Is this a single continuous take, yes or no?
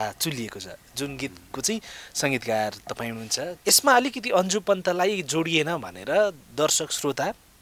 no